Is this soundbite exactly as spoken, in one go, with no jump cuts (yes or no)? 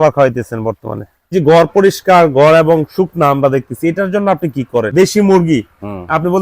no